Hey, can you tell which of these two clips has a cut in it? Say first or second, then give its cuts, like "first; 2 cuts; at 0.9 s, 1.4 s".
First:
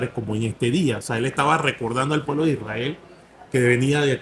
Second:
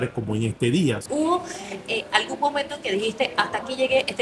second; 1 cut; at 1.0 s